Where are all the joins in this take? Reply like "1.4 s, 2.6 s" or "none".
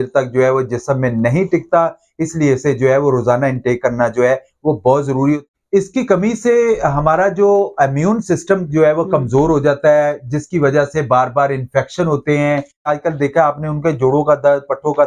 5.4 s, 12.9 s